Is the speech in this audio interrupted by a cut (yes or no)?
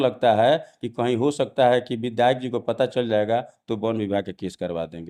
no